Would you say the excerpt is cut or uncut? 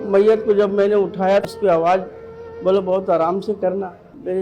cut